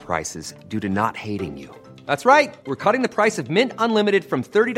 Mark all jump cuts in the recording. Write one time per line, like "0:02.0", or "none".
none

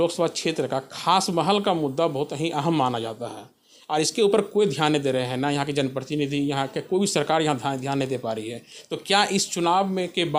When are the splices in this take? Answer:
none

